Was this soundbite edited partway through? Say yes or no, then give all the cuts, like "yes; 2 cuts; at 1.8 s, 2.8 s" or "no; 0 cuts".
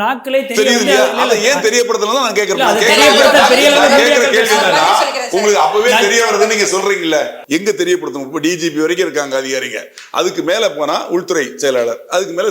yes; 1 cut; at 7.4 s